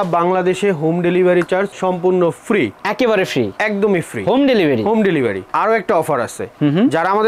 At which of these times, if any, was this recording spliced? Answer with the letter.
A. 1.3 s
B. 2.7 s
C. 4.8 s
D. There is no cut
D